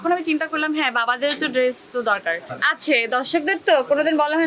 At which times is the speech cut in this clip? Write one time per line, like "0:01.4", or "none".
0:02.0